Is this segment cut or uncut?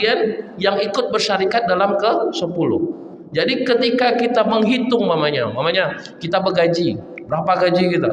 uncut